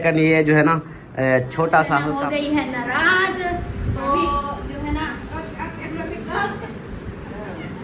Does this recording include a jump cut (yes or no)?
yes